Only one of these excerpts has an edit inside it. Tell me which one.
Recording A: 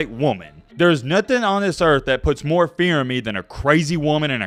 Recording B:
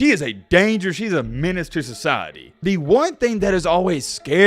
B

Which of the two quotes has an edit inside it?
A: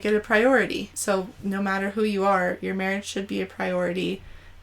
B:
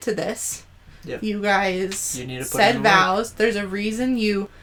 A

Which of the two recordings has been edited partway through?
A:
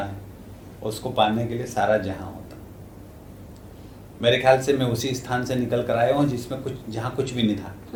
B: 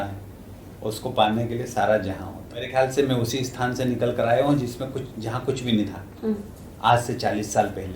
B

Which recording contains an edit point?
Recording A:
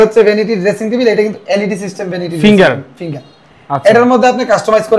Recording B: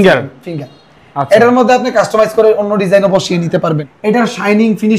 B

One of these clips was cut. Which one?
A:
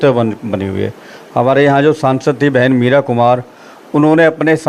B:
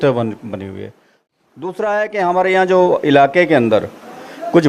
B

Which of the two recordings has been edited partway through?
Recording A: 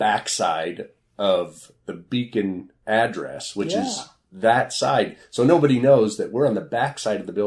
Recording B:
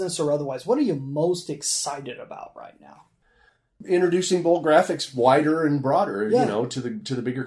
A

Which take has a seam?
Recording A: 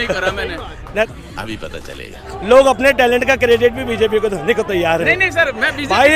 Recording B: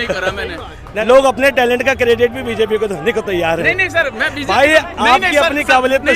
B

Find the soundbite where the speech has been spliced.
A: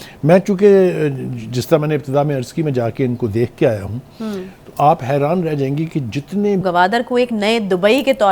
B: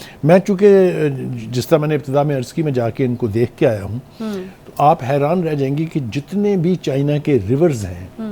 A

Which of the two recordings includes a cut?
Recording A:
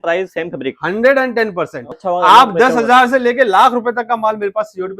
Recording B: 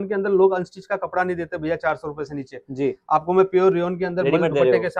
A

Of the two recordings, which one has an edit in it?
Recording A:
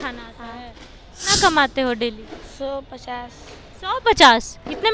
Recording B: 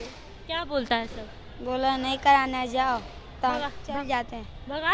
A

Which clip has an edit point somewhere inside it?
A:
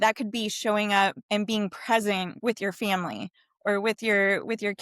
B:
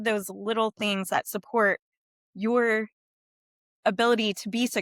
A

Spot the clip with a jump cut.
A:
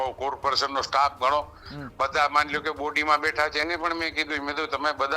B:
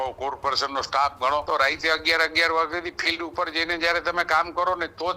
B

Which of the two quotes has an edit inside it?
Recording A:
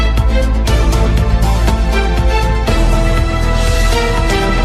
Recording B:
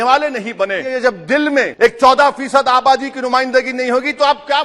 B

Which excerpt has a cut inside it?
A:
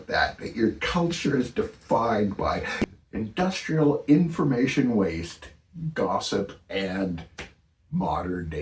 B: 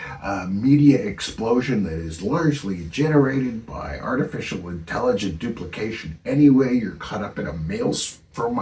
A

